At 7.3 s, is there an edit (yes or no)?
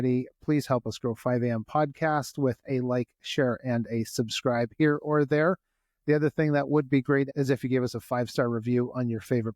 yes